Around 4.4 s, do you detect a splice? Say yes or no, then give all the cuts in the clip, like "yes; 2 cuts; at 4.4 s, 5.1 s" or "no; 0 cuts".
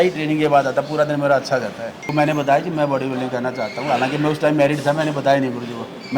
no; 1 cut; at 2.0 s